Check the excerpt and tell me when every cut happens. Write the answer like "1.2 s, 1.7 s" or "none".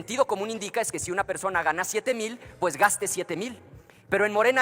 none